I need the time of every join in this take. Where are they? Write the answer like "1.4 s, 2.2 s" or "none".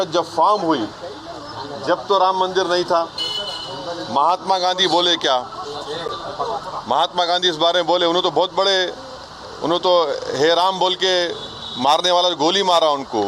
none